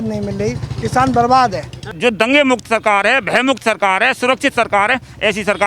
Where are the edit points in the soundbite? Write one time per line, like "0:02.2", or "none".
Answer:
0:01.9